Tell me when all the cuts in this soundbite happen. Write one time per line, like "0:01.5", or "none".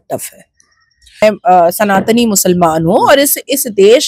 0:01.2